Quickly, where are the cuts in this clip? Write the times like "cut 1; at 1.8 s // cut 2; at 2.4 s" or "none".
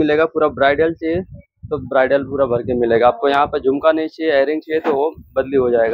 none